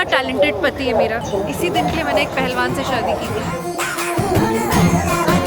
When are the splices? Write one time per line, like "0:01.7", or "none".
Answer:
0:01.2